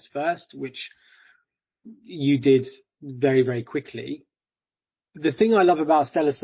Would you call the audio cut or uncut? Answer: cut